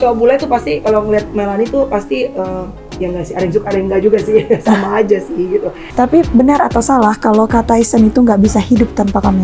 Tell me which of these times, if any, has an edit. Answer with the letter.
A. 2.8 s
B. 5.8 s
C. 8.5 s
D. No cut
B